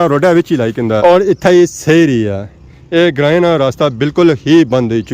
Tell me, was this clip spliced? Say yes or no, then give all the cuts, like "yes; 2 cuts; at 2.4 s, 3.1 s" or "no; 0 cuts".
yes; 1 cut; at 1.0 s